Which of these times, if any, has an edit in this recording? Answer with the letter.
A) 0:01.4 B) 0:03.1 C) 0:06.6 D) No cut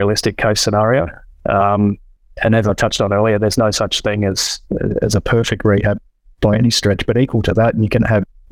D